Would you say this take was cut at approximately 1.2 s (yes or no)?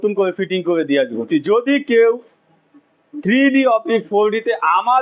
yes